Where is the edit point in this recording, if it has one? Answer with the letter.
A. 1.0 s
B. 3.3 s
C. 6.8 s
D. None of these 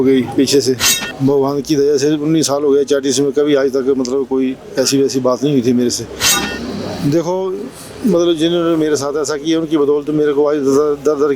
A